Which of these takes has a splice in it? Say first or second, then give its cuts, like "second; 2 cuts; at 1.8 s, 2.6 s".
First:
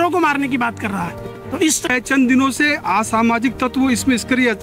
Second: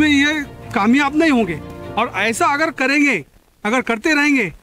first; 1 cut; at 1.9 s